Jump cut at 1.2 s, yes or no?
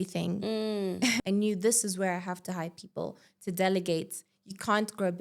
yes